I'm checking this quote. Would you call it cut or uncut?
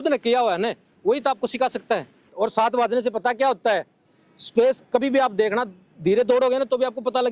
cut